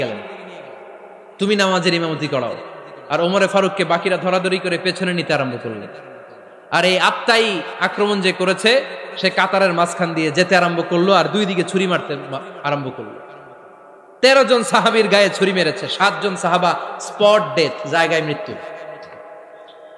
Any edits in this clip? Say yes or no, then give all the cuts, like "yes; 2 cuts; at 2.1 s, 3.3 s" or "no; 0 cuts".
no; 0 cuts